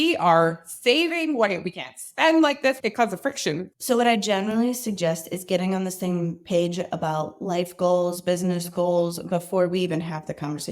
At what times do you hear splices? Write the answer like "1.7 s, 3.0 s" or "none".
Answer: 2.8 s, 3.7 s